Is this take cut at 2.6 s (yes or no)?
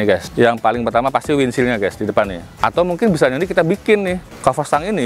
yes